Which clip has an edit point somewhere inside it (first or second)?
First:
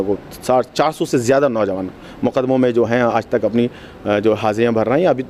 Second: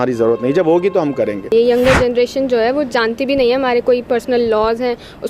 second